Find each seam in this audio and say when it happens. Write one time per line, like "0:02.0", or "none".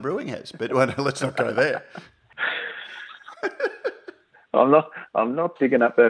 0:02.2